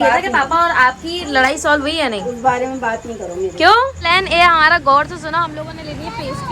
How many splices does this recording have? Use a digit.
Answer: 1